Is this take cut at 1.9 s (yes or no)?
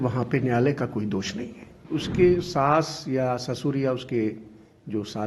yes